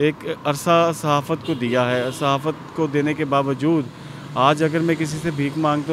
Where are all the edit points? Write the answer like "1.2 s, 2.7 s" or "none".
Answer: none